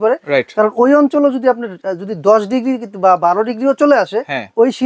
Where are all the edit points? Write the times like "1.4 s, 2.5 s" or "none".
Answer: none